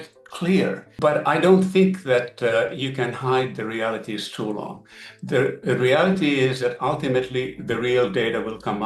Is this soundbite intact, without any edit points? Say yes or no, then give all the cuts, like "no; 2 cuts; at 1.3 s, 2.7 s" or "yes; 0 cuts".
yes; 0 cuts